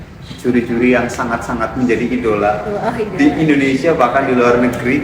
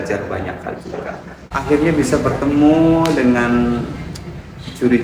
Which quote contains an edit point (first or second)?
second